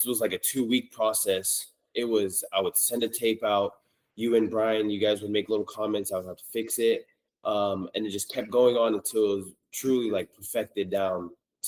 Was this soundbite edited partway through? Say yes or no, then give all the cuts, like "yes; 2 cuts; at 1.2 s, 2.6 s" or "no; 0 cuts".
no; 0 cuts